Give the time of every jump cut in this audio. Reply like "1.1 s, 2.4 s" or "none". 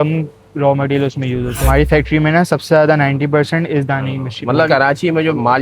1.7 s, 4.7 s

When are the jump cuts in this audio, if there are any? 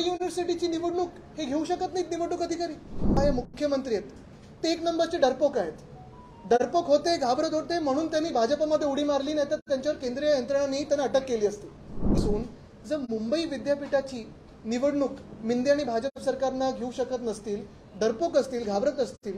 3.2 s, 12.2 s

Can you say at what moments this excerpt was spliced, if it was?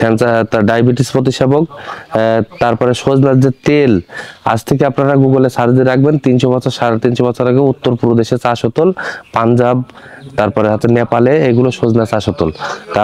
none

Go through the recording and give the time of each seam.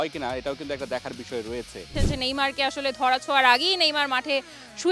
2.0 s

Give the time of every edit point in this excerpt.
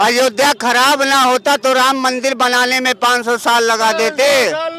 none

